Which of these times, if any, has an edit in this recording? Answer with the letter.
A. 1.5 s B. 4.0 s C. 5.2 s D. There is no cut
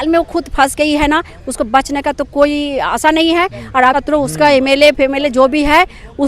B